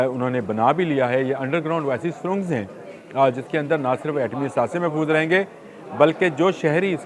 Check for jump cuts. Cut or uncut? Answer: uncut